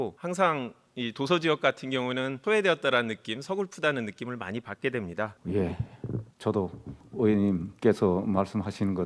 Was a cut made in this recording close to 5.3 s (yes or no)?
yes